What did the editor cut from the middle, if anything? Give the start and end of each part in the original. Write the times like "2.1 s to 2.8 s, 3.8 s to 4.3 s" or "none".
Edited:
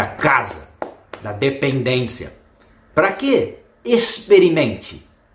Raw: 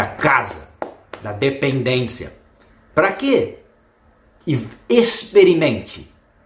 3.9 s to 4.9 s